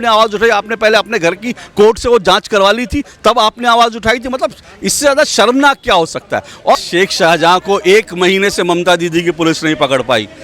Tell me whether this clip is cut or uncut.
cut